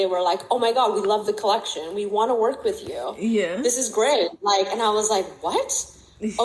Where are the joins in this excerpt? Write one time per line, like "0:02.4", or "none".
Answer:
none